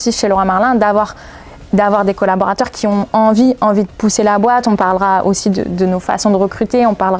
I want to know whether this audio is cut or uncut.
uncut